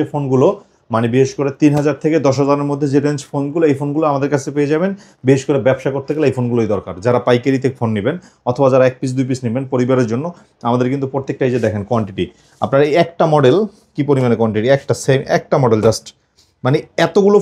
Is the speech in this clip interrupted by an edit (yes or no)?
no